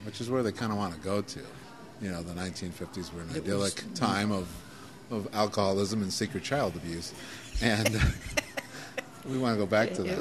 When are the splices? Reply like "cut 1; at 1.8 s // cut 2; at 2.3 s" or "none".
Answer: cut 1; at 1.5 s

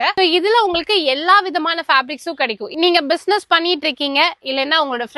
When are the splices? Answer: cut 1; at 2.7 s

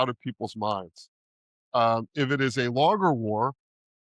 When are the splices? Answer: none

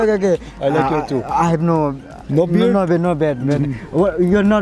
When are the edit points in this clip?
none

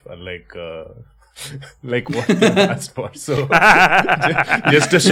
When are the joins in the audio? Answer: none

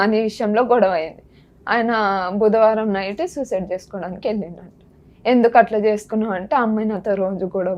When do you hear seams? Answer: none

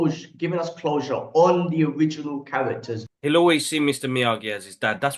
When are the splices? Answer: cut 1; at 3.1 s

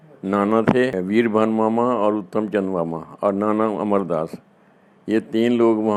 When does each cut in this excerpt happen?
none

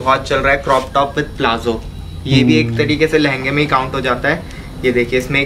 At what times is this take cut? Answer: none

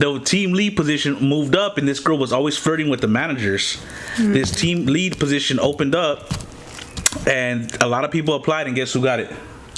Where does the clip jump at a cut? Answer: none

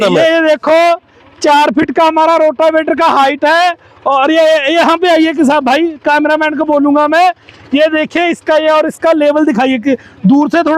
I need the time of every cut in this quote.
none

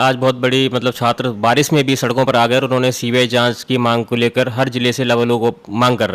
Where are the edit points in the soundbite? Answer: none

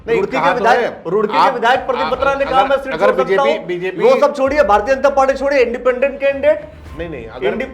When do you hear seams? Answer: none

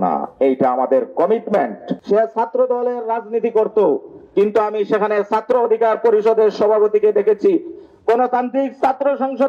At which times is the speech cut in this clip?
cut 1; at 1.9 s

